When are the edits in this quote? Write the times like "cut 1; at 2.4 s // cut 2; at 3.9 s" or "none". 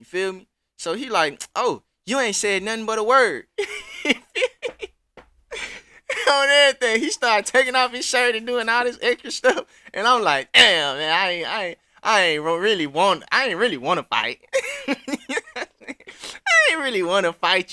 none